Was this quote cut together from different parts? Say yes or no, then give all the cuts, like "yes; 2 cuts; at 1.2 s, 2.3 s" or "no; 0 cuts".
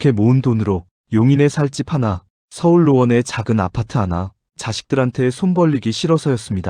yes; 1 cut; at 4.4 s